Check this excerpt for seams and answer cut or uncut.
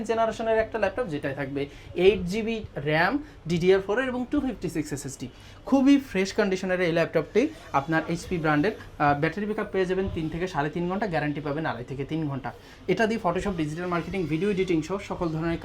uncut